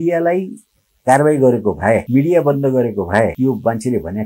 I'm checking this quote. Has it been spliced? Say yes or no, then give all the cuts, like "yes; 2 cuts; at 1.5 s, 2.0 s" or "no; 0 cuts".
yes; 2 cuts; at 2.1 s, 3.3 s